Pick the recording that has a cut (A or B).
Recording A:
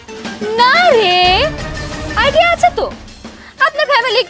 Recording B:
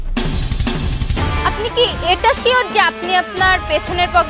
B